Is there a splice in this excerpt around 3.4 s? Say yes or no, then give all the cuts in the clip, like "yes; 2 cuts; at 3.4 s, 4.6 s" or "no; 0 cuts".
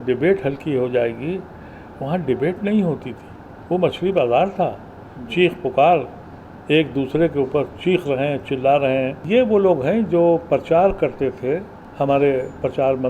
no; 2 cuts; at 9.2 s, 11.8 s